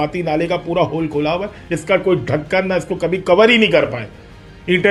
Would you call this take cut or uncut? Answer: uncut